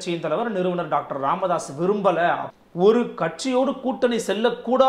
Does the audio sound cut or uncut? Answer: cut